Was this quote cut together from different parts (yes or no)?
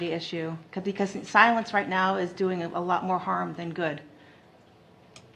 no